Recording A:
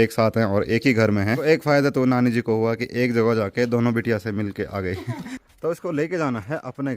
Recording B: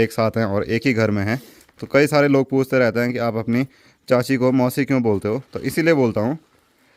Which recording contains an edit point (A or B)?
A